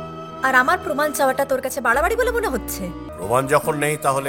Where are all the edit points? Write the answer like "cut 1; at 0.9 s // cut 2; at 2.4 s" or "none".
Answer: cut 1; at 3.1 s